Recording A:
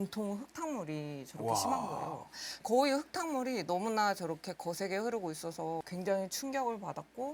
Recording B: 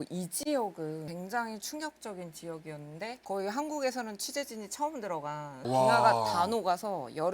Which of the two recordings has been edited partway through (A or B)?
B